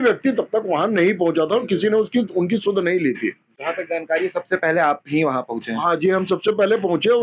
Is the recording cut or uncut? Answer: uncut